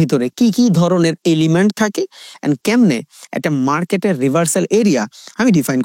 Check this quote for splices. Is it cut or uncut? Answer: uncut